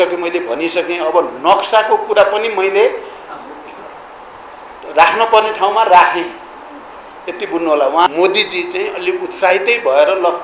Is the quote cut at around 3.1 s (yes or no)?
no